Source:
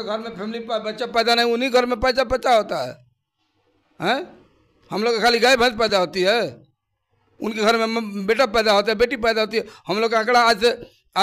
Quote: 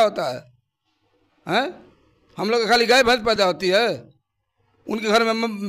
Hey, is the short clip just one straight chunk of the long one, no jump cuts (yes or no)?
yes